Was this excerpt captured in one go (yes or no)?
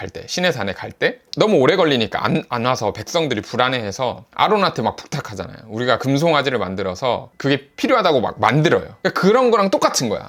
yes